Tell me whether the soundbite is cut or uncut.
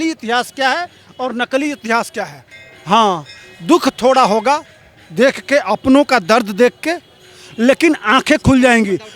cut